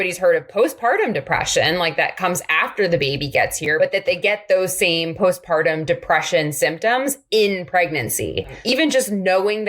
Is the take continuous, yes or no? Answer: no